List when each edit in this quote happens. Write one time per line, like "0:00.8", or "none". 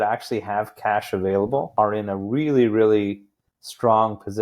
0:01.7